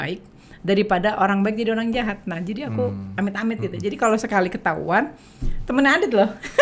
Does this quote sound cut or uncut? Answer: uncut